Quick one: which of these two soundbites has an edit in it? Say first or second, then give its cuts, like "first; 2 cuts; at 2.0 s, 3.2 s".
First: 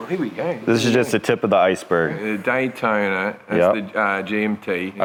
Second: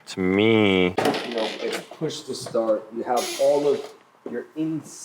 second; 1 cut; at 0.9 s